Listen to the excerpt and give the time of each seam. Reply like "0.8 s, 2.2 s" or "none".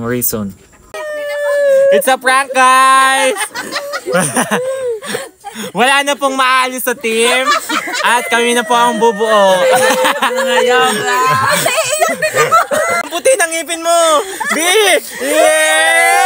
1.1 s, 13.0 s